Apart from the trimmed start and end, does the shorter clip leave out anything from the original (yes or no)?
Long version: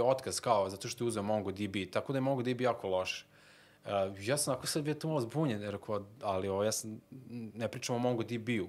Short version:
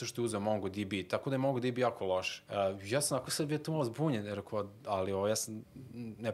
yes